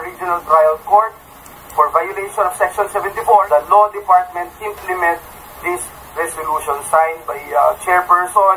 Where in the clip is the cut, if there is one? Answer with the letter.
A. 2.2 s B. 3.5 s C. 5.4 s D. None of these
B